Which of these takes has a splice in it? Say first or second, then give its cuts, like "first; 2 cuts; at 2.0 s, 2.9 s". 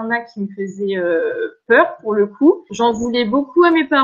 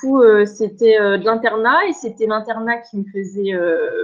first; 1 cut; at 2.7 s